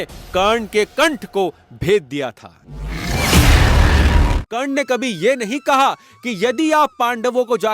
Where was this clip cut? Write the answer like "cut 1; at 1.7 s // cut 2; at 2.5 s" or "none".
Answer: cut 1; at 4.4 s

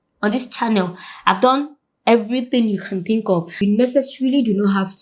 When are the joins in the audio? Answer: cut 1; at 3.6 s

